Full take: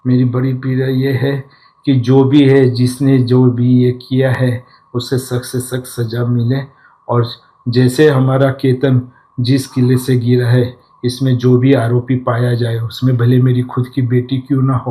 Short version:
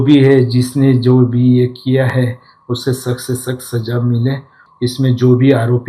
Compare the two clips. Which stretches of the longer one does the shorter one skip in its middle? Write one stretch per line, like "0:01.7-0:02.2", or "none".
0:06.9-0:10.8